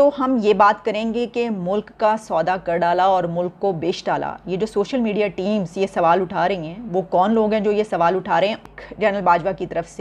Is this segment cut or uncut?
cut